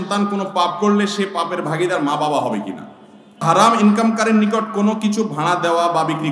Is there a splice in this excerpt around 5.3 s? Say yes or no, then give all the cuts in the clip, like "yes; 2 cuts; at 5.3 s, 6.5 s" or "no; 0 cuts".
no; 1 cut; at 3.4 s